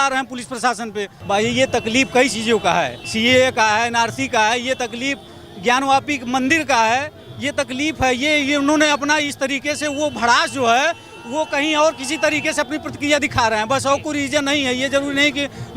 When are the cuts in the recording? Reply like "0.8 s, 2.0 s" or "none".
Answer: 1.1 s, 3.0 s